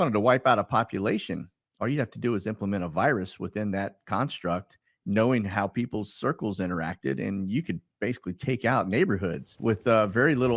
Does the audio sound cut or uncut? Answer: cut